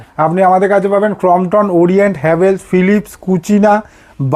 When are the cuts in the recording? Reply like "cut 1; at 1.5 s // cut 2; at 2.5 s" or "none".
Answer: none